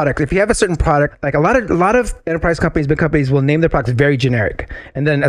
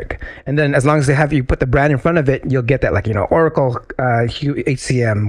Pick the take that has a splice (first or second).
first